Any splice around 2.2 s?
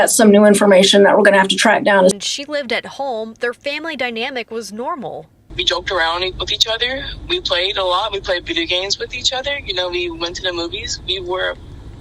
yes; 1 cut; at 2.2 s

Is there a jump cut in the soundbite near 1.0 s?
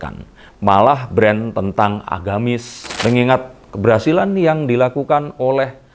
no; 1 cut; at 3.0 s

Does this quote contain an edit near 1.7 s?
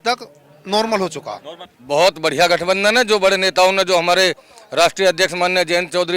yes; 1 cut; at 1.7 s

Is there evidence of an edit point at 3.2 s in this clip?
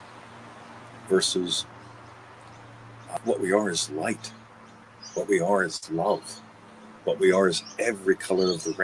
yes; 1 cut; at 3.2 s

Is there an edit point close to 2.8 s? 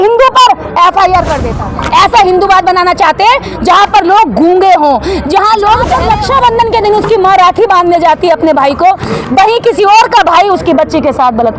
no; 2 cuts; at 1.4 s, 6.0 s

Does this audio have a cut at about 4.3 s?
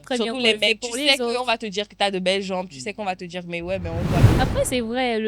yes; 1 cut; at 4.3 s

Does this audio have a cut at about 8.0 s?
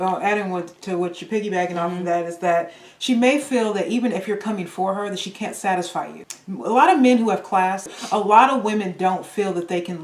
yes; 2 cuts; at 6.2 s, 8.0 s

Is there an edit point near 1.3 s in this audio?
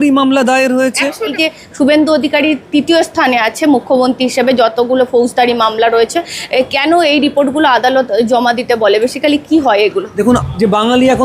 yes; 2 cuts; at 1.3 s, 10.1 s

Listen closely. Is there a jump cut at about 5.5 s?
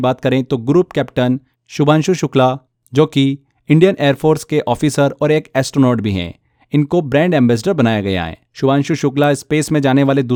no; 0 cuts

